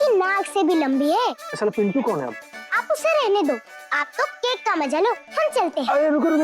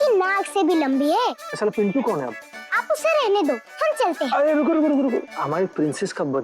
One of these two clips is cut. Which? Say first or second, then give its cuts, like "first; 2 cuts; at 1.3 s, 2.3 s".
second; 2 cuts; at 3.7 s, 5.3 s